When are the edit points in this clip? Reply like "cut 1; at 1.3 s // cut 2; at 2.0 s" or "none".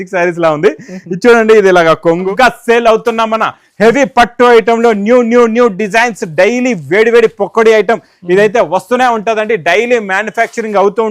cut 1; at 2.3 s